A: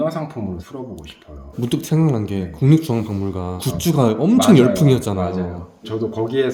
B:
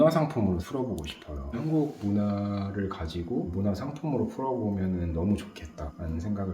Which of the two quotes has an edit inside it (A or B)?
B